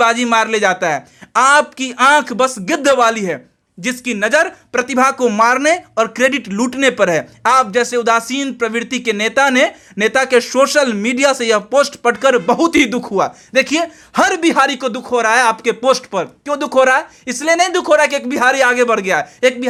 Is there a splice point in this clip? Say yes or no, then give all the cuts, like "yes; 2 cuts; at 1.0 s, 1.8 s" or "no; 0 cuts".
no; 0 cuts